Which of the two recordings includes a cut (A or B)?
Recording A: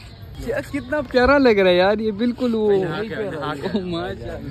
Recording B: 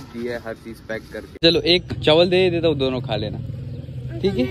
B